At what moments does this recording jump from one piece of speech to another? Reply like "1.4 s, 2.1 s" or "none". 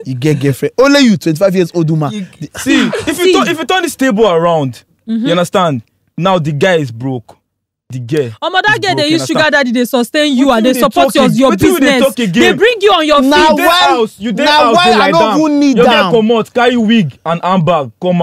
none